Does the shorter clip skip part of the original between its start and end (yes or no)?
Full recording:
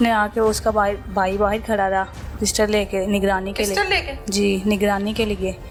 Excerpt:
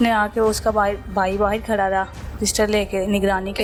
no